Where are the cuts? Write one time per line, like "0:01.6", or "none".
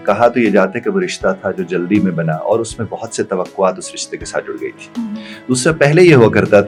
none